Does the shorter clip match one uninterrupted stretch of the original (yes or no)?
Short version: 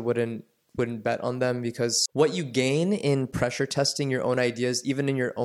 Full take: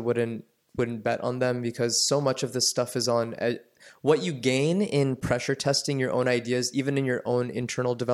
no